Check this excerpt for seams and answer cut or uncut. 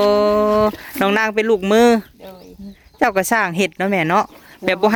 uncut